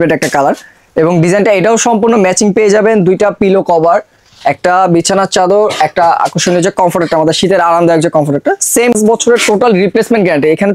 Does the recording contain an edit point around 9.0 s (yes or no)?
yes